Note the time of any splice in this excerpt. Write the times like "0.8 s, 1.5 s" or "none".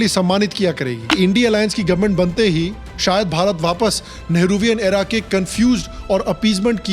1.1 s